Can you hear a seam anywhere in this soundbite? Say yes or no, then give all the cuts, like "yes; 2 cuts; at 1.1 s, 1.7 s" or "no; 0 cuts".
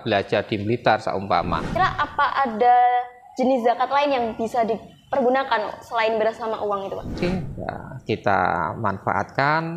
yes; 2 cuts; at 1.7 s, 7.2 s